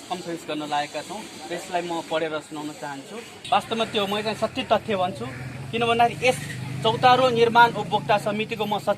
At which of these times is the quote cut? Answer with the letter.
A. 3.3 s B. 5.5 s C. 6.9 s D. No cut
A